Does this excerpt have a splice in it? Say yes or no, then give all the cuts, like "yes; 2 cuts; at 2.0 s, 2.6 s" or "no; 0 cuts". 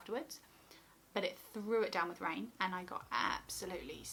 no; 0 cuts